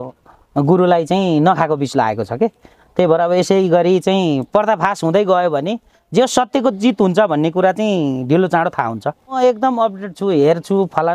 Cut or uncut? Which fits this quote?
cut